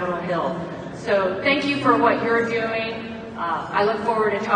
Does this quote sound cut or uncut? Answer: uncut